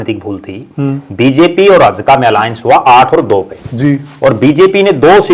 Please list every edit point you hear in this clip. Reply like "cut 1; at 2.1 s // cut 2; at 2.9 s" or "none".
none